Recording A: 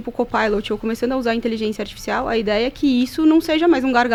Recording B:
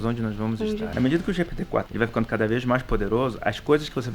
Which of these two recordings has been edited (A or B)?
B